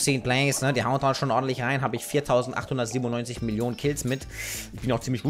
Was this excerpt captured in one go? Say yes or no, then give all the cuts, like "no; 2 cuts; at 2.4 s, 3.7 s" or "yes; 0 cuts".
yes; 0 cuts